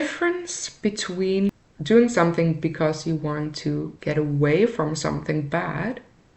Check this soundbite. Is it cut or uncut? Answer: cut